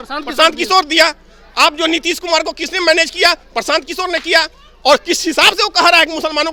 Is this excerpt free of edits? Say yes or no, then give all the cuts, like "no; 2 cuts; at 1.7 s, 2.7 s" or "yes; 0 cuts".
yes; 0 cuts